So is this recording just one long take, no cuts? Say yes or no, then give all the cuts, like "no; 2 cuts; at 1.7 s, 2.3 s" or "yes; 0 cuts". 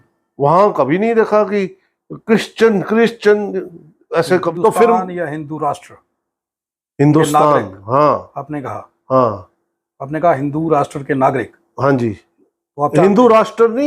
no; 1 cut; at 4.5 s